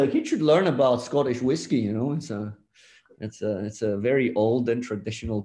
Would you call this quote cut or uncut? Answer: uncut